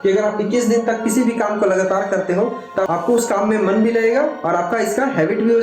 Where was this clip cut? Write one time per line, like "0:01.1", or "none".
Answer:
0:02.9